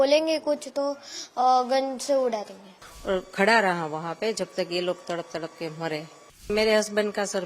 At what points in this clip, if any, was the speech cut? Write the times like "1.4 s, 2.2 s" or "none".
2.9 s, 6.5 s